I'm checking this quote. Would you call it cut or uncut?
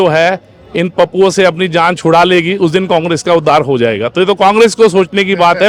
uncut